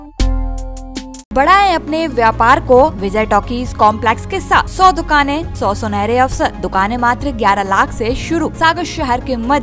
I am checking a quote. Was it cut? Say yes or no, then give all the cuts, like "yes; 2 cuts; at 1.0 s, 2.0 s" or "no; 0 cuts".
yes; 6 cuts; at 1.3 s, 3.0 s, 4.7 s, 5.5 s, 6.6 s, 8.5 s